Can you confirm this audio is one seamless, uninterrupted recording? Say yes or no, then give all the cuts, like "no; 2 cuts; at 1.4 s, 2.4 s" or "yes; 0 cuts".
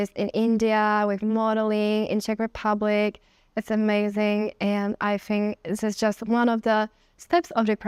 yes; 0 cuts